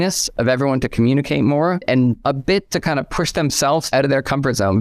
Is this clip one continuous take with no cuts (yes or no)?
no